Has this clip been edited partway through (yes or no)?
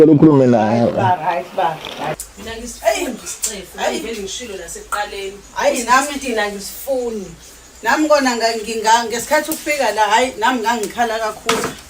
yes